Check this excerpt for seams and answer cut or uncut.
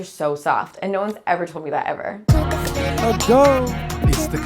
cut